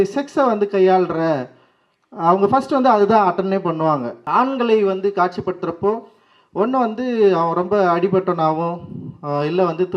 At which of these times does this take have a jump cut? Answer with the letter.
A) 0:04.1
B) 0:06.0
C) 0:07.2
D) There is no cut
A